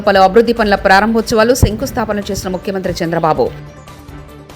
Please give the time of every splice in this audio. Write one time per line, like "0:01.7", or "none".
0:03.5